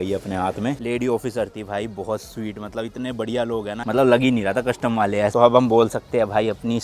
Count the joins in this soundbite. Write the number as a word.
three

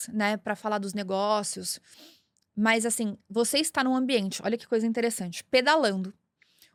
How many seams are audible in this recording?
zero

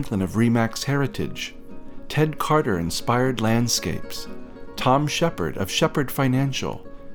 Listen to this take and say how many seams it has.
zero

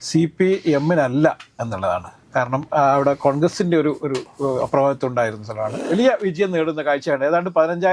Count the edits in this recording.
one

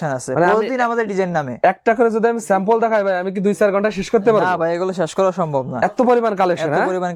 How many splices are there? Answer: zero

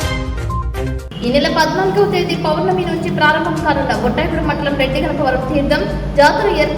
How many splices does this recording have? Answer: one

